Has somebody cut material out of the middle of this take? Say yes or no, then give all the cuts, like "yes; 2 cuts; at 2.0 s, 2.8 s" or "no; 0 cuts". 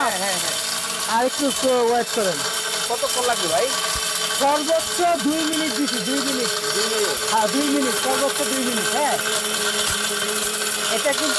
no; 0 cuts